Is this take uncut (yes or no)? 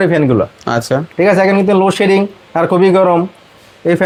yes